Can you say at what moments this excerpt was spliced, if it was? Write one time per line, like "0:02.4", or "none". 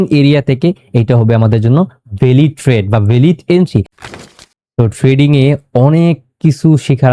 0:04.1